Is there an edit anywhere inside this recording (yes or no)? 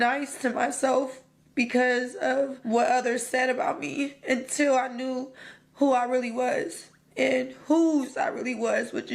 yes